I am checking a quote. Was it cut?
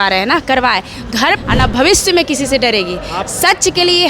yes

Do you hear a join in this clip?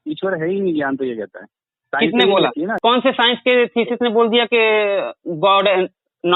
yes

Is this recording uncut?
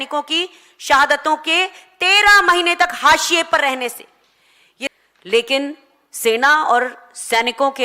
no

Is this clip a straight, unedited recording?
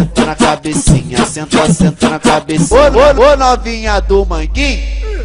yes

